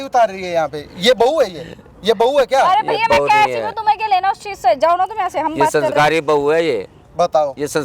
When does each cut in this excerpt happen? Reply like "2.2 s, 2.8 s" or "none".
none